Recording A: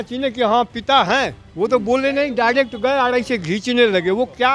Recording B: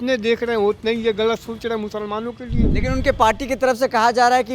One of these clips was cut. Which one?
B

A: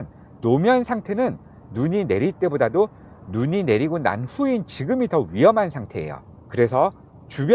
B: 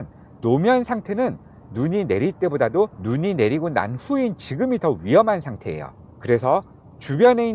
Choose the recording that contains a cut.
B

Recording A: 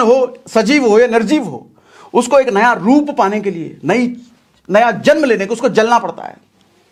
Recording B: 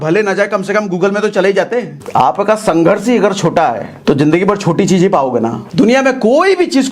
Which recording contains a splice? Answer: B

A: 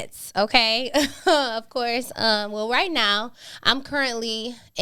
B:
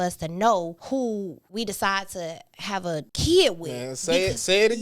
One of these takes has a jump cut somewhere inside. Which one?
B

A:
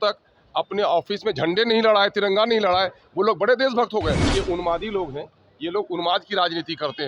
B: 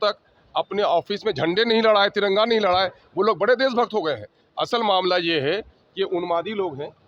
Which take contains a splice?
A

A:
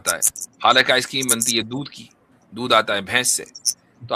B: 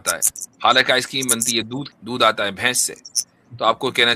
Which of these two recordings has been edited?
B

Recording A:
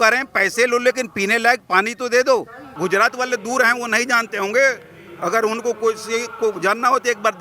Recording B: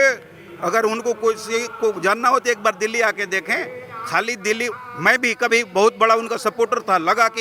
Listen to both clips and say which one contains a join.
A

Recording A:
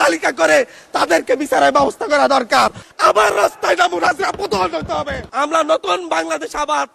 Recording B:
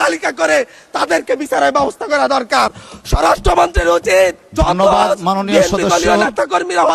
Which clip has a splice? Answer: A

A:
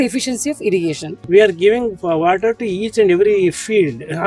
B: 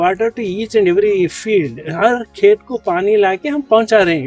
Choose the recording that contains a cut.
A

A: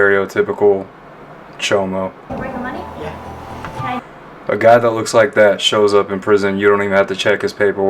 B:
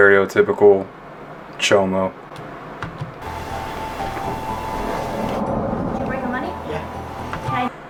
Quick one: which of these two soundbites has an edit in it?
A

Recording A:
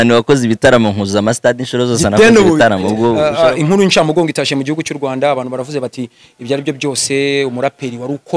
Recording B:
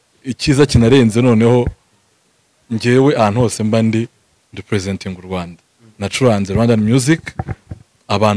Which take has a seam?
A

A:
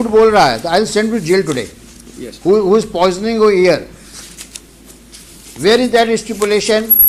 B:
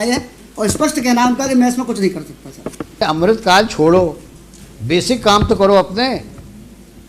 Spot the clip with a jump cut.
B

